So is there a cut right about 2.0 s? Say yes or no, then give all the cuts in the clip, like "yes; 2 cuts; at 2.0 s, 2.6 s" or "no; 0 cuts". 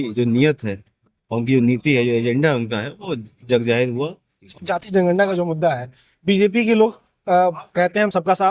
no; 1 cut; at 4.4 s